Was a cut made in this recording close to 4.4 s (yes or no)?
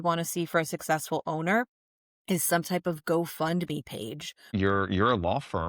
yes